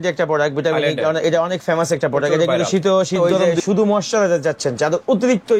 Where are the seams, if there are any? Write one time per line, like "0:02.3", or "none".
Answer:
0:03.2